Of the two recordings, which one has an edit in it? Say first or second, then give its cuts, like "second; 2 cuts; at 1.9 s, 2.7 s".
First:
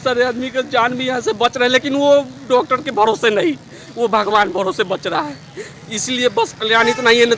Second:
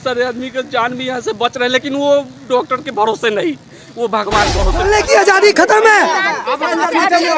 second; 1 cut; at 4.8 s